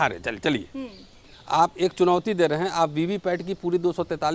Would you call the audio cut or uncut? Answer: uncut